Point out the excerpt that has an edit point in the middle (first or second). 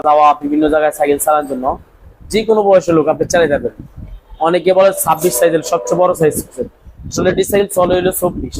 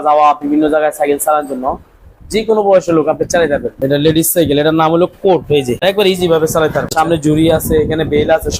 second